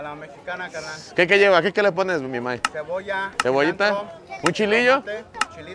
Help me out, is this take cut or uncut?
cut